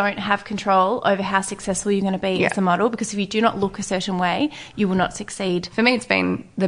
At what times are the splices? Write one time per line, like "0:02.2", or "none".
0:05.7